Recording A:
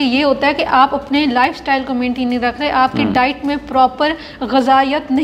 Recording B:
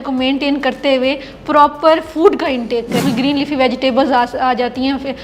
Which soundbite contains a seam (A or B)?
B